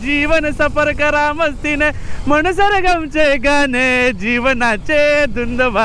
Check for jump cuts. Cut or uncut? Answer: uncut